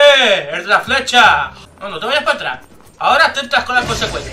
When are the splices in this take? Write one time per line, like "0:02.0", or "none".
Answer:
0:01.6